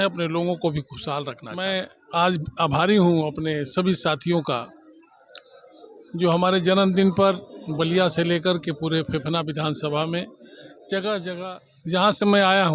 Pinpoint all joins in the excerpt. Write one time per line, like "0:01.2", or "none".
0:01.5
0:11.4